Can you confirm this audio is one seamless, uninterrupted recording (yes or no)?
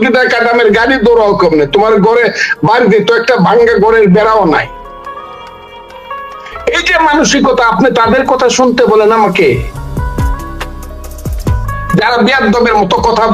yes